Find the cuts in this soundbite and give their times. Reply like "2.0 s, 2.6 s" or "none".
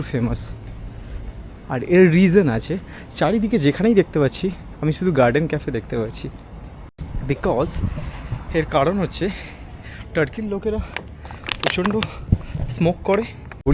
none